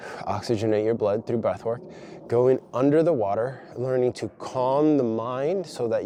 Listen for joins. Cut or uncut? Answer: uncut